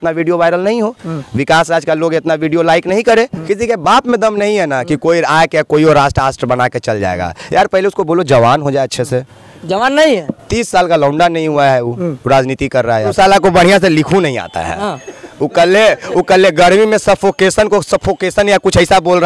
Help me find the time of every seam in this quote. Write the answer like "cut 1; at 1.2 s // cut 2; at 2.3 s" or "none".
cut 1; at 3.4 s // cut 2; at 13.1 s

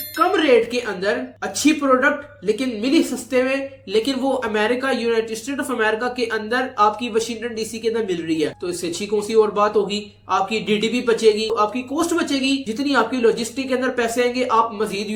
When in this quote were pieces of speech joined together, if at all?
none

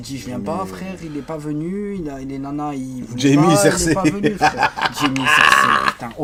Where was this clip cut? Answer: none

